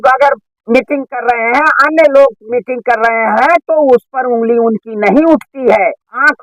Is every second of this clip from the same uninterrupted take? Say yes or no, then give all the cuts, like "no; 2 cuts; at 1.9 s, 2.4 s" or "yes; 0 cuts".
yes; 0 cuts